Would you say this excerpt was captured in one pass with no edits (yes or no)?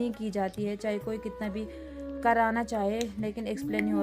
yes